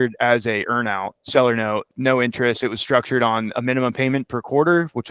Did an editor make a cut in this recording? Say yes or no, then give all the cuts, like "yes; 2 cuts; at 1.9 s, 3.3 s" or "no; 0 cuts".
yes; 2 cuts; at 1.1 s, 1.9 s